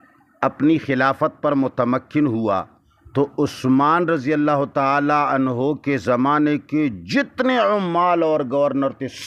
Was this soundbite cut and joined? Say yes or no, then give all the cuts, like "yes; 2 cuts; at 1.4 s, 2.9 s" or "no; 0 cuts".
no; 0 cuts